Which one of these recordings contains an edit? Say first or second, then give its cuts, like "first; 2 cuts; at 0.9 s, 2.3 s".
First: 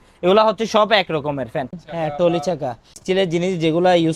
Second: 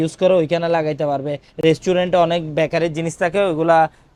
first; 2 cuts; at 1.8 s, 2.9 s